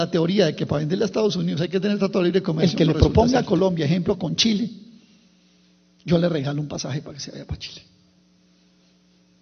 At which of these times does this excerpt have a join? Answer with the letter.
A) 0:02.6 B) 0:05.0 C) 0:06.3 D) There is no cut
A